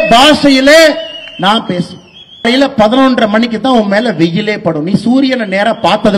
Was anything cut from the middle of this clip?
yes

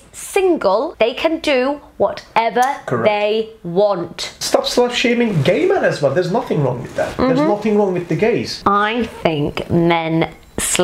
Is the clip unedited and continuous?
no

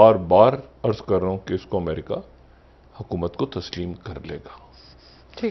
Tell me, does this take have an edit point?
no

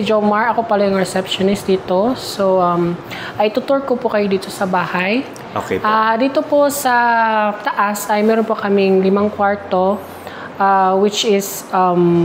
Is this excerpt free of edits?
yes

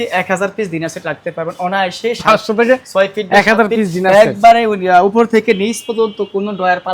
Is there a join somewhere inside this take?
no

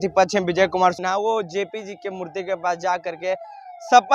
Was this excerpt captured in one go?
no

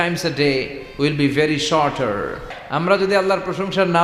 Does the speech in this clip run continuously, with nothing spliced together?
no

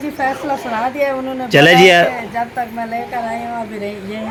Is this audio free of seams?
yes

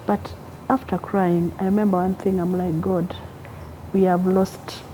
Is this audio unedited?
yes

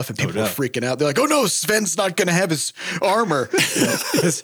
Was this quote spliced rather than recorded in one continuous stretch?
no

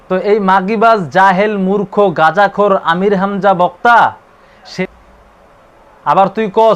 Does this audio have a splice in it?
yes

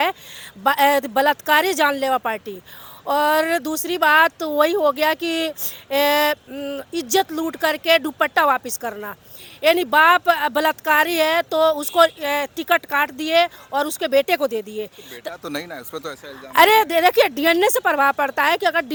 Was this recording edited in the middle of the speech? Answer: no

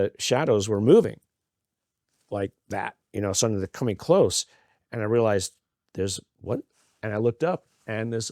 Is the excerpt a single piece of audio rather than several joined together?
yes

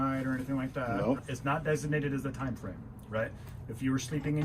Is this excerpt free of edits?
no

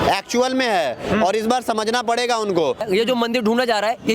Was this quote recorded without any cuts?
no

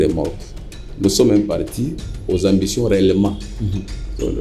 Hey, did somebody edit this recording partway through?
no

